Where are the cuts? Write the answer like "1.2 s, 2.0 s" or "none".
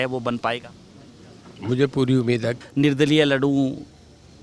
2.5 s